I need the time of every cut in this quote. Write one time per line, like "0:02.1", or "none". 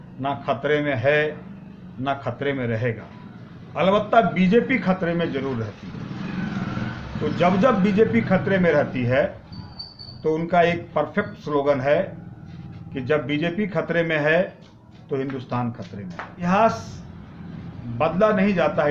0:16.4